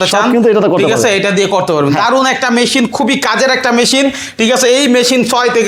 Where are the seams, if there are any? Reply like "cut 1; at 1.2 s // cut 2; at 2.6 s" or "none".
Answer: none